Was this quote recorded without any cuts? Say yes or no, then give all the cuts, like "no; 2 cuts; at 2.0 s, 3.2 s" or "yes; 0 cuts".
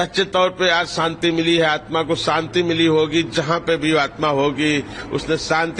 yes; 0 cuts